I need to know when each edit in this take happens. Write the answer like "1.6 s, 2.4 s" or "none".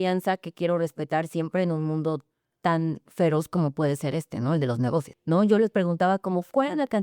5.1 s